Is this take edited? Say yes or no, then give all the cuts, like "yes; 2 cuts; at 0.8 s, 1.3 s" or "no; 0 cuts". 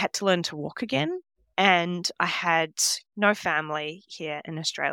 yes; 1 cut; at 1.3 s